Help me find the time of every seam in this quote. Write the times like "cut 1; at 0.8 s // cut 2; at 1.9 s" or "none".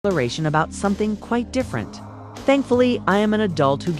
cut 1; at 2.8 s